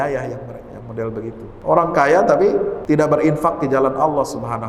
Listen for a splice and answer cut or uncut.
cut